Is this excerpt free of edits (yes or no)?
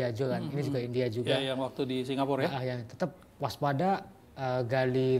yes